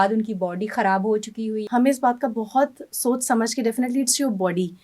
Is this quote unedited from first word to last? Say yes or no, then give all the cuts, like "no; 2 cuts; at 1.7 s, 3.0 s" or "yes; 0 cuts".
no; 1 cut; at 1.6 s